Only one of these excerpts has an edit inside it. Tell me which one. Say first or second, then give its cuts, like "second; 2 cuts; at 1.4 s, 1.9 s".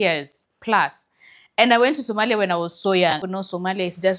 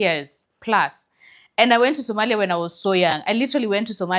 first; 1 cut; at 3.2 s